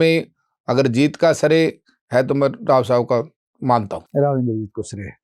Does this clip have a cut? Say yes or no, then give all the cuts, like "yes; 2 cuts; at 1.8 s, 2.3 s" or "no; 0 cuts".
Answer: no; 0 cuts